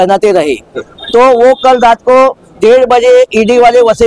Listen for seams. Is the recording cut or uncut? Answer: uncut